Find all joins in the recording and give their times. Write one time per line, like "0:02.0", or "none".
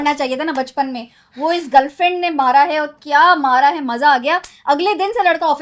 none